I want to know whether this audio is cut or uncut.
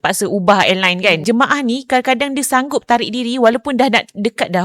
cut